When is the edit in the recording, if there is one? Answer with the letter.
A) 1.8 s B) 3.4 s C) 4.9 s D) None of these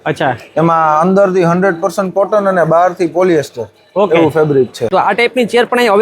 C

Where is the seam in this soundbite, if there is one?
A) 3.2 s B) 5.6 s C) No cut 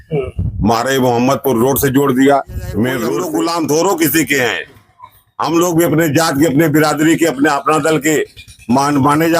A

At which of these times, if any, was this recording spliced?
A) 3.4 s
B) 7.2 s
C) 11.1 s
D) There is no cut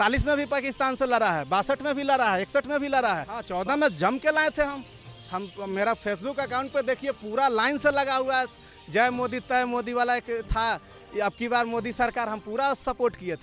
A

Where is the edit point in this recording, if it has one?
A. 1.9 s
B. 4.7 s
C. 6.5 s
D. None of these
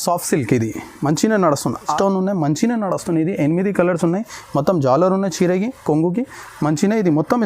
A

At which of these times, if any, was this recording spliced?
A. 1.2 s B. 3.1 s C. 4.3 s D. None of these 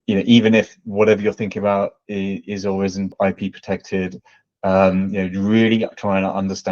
B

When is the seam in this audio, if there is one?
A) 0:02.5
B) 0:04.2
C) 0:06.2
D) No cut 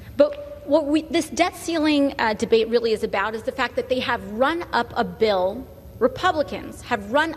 D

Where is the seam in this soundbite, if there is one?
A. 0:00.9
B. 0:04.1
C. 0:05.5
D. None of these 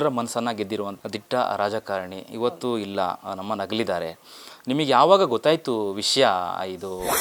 A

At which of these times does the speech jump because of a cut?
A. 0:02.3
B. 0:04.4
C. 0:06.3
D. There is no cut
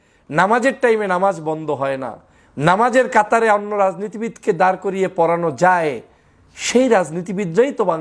D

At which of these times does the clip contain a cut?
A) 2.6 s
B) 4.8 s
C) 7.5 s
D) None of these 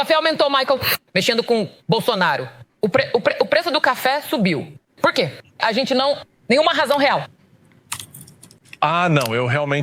D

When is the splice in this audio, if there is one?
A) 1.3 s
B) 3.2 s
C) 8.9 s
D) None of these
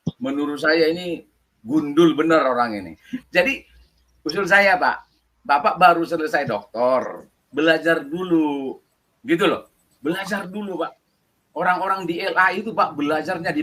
B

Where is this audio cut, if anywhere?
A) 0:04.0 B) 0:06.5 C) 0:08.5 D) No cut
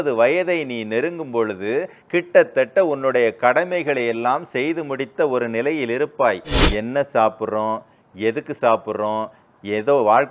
B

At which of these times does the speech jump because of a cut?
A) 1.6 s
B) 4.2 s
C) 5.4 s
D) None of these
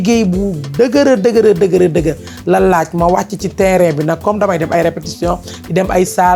D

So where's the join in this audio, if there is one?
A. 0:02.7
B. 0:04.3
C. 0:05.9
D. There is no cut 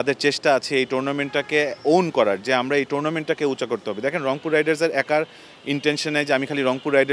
D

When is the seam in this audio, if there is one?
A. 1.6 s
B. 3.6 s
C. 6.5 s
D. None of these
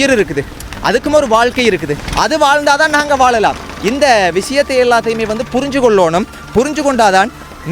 D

